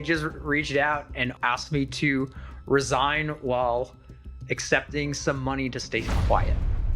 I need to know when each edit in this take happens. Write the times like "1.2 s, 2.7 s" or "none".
1.3 s